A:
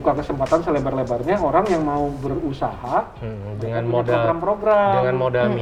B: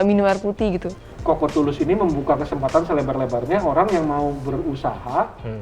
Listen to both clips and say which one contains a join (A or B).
B